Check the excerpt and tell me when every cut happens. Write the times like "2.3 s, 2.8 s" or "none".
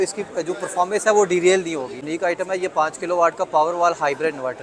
2.0 s